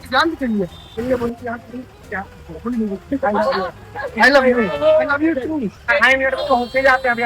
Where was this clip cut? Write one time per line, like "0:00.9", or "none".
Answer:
0:00.8
0:05.9